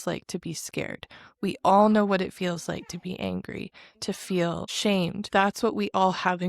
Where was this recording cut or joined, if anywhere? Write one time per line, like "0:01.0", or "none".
0:05.0